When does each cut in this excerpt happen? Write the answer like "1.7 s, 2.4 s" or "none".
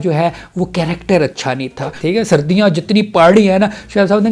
1.9 s